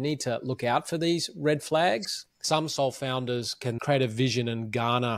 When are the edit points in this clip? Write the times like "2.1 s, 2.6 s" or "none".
2.4 s, 3.8 s